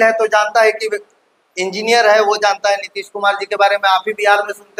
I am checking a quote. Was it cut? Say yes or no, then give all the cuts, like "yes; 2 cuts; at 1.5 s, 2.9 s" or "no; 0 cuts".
no; 0 cuts